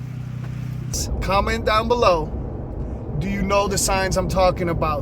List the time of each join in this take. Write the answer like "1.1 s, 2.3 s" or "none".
0.9 s